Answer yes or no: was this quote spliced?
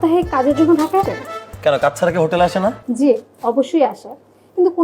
yes